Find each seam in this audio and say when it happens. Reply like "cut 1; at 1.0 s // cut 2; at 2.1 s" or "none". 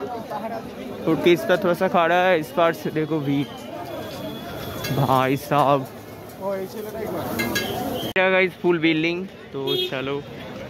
cut 1; at 8.1 s